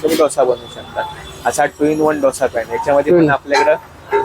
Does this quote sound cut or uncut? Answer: uncut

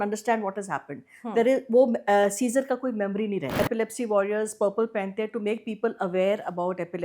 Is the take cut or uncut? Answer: cut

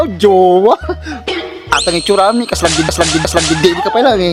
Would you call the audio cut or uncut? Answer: uncut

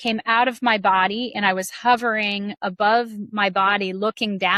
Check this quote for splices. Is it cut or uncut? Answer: uncut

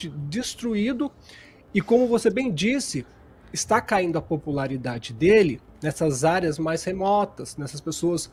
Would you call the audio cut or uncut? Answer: uncut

